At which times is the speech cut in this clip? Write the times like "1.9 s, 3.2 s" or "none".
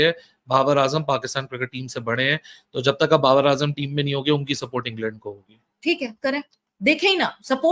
none